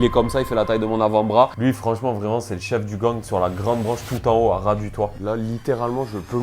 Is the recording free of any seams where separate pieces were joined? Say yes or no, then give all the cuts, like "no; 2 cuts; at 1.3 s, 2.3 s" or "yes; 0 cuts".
no; 2 cuts; at 1.5 s, 5.2 s